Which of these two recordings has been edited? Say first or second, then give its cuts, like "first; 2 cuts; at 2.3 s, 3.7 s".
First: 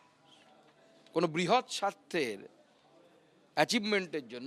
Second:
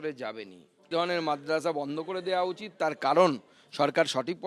second; 1 cut; at 0.9 s